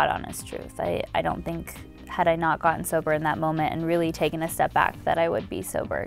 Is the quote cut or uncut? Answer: uncut